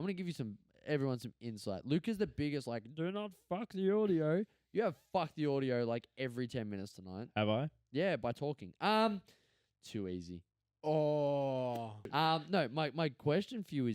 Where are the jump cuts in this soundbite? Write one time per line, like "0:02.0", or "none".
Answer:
0:12.1